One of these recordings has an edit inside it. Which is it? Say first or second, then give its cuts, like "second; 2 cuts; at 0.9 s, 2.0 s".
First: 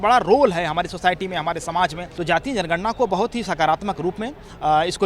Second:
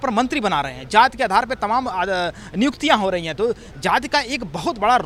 first; 1 cut; at 2.1 s